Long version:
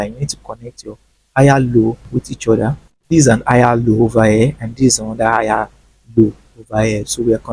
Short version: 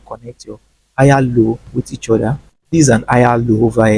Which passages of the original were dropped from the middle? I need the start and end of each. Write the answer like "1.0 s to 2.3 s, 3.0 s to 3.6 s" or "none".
none